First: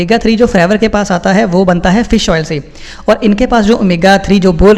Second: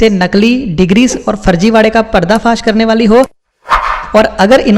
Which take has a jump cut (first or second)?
second